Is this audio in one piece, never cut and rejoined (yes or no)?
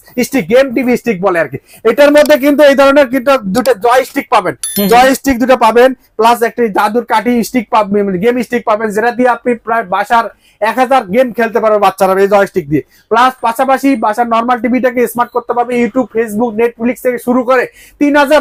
yes